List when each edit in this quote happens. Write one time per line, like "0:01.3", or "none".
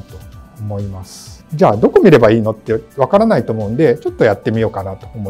none